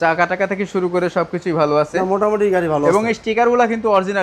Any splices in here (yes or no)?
no